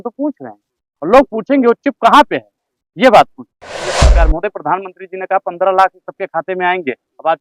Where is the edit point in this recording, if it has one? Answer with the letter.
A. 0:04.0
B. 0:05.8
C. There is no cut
A